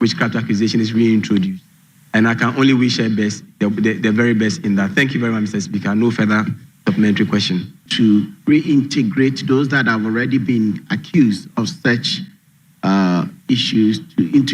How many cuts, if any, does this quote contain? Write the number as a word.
one